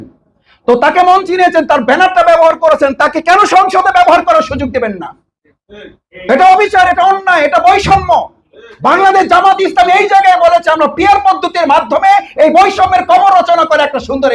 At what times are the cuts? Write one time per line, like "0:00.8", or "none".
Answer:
none